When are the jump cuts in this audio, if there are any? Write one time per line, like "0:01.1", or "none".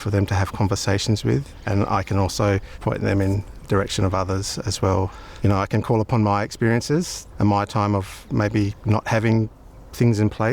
0:01.5
0:02.7
0:05.2
0:07.2
0:08.5